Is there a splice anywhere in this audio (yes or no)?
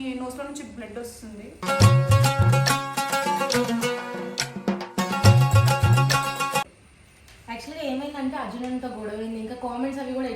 no